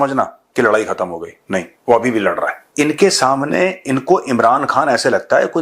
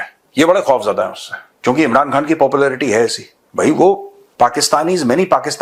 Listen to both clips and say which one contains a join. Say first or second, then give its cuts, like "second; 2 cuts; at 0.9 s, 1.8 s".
first; 1 cut; at 2.6 s